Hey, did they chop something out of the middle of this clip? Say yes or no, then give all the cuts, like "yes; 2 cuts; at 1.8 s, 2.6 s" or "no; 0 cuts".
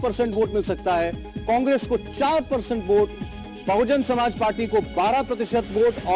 no; 0 cuts